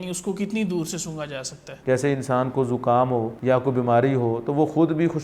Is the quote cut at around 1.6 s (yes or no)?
yes